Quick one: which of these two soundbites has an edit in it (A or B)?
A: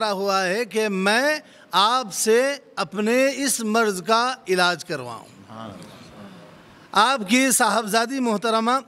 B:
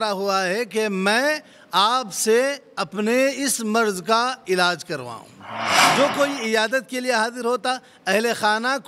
B